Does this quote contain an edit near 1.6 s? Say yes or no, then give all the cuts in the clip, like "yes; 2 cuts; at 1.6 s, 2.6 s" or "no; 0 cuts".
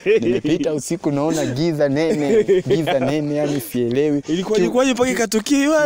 no; 0 cuts